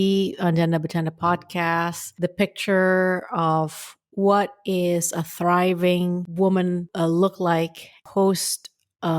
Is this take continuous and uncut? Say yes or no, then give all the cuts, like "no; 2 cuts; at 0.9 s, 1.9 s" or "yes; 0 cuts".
no; 4 cuts; at 2.0 s, 6.3 s, 6.9 s, 8.0 s